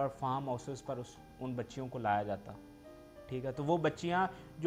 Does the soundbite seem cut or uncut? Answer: uncut